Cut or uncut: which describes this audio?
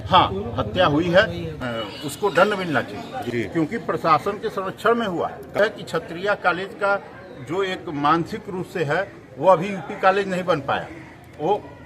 cut